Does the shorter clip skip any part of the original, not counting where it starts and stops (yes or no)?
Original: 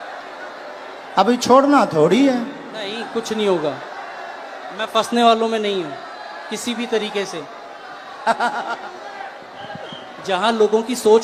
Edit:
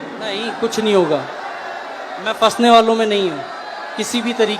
no